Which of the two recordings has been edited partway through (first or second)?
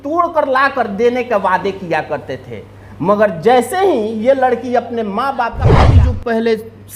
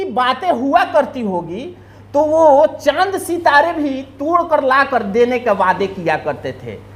first